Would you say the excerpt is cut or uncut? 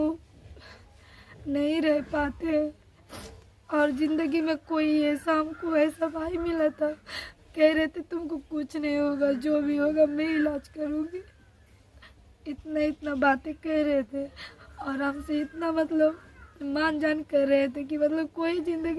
uncut